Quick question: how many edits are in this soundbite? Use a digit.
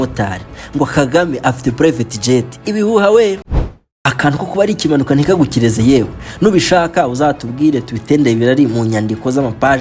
1